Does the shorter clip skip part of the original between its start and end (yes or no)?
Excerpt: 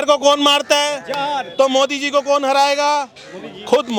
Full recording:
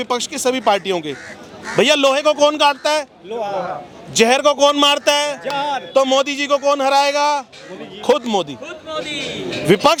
no